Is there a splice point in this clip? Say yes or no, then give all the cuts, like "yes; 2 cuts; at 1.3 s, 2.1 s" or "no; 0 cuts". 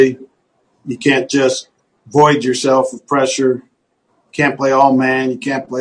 no; 0 cuts